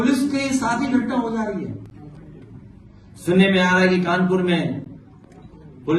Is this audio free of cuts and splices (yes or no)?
yes